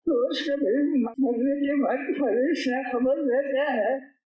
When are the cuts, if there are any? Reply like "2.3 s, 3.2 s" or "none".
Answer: 1.1 s